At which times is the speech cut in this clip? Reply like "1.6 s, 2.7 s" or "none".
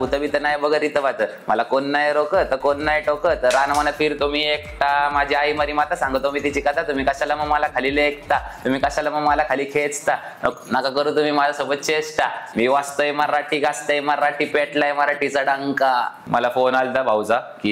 16.2 s